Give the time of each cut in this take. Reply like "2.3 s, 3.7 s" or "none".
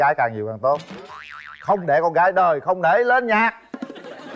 none